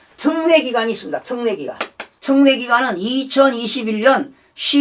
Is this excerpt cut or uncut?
cut